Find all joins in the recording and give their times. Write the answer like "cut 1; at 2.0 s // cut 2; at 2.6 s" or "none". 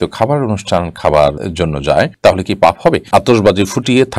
cut 1; at 1.4 s // cut 2; at 3.0 s

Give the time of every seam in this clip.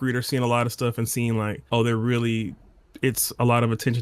cut 1; at 1.6 s

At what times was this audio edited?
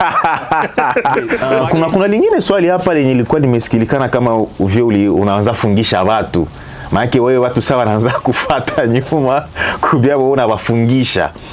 cut 1; at 1.4 s

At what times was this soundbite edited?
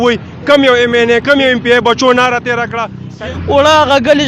cut 1; at 3.1 s

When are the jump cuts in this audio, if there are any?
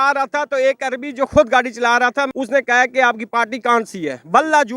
cut 1; at 2.3 s

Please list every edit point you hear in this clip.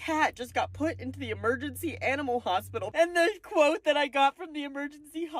cut 1; at 2.9 s

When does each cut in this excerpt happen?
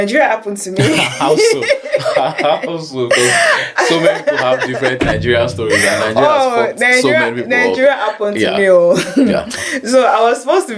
none

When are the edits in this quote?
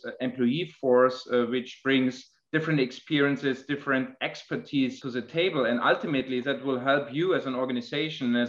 cut 1; at 5.0 s

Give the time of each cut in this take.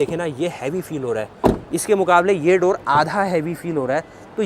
none

